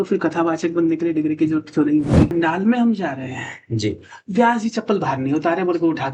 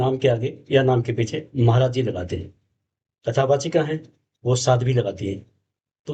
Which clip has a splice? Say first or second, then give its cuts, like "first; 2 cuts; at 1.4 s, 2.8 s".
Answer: first; 1 cut; at 2.3 s